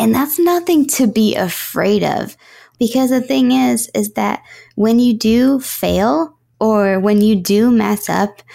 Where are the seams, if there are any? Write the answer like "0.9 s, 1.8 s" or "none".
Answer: 2.7 s